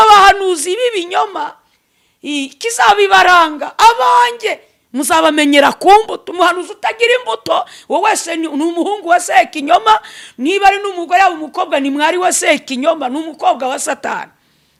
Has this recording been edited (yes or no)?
no